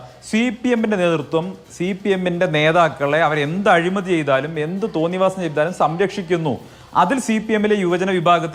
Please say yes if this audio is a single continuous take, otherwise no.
yes